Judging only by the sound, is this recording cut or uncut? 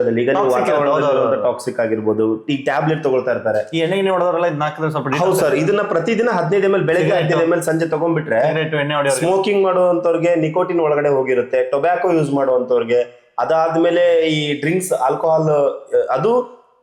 uncut